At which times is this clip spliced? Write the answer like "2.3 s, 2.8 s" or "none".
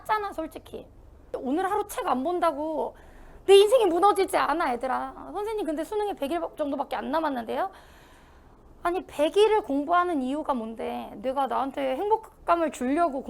1.3 s

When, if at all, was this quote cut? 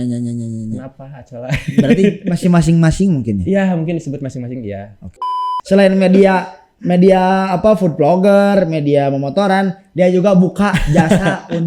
5.5 s

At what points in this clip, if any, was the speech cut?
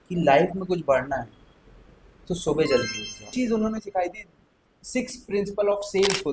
3.3 s

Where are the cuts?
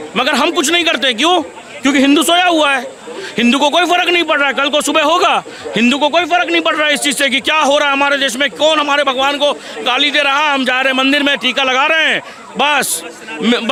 none

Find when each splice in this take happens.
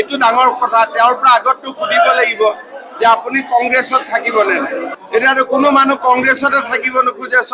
5.0 s

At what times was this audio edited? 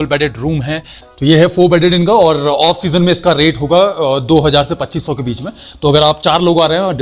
1.1 s

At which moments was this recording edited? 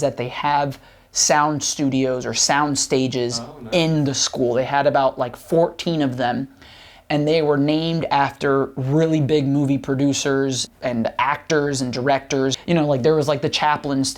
10.7 s, 12.6 s

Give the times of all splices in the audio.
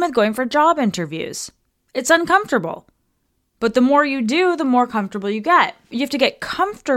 5.9 s

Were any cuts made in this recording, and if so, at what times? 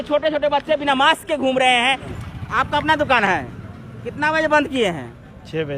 2.1 s

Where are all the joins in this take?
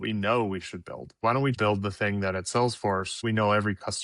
1.5 s, 3.2 s

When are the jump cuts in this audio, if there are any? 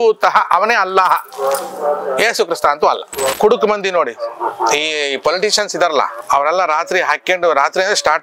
3.3 s, 6.2 s

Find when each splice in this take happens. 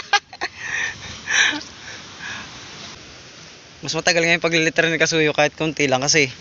2.9 s

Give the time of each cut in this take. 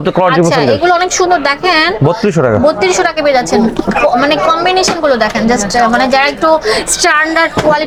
none

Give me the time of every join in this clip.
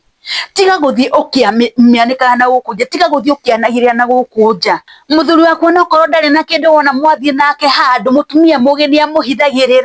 4.9 s

